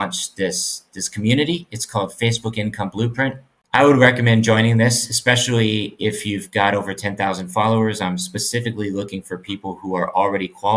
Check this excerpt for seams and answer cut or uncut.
cut